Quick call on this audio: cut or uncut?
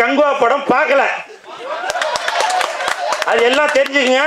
uncut